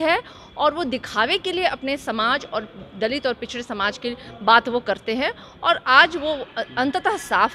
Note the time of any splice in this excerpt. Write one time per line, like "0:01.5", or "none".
none